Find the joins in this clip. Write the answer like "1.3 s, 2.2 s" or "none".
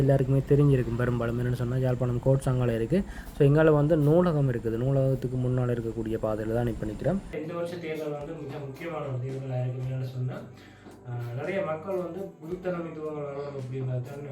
7.4 s